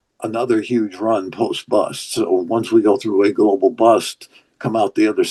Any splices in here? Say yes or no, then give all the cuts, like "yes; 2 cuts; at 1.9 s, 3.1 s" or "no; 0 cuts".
no; 0 cuts